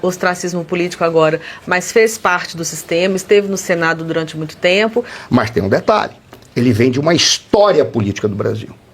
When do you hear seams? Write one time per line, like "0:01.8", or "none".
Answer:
0:05.2